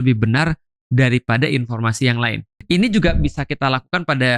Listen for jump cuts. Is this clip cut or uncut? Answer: cut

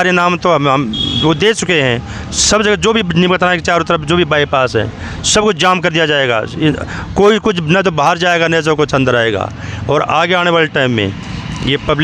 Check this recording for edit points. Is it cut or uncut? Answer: uncut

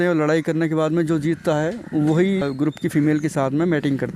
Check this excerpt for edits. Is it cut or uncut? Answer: uncut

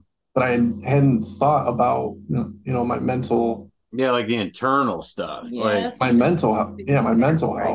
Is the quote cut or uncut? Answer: uncut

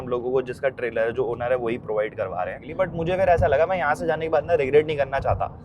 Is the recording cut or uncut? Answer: cut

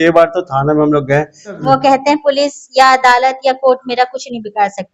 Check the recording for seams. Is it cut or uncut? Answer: cut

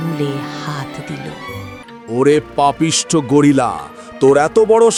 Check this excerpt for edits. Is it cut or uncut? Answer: uncut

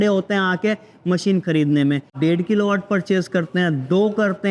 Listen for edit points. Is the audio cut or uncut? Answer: cut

